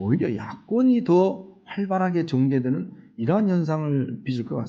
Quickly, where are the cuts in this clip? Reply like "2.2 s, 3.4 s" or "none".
none